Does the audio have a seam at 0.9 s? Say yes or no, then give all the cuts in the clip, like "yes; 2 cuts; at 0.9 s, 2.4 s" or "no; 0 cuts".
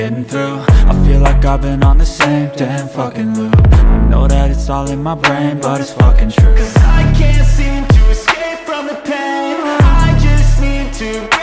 yes; 1 cut; at 0.9 s